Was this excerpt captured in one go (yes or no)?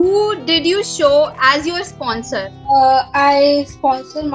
no